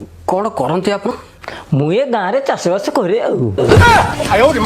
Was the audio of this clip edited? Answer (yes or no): yes